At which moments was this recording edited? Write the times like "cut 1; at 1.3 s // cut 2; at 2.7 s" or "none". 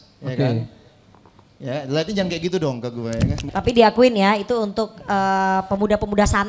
cut 1; at 3.4 s